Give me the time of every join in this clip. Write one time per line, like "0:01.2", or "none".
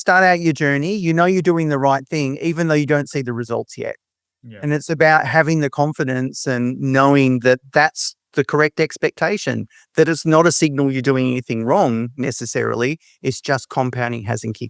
none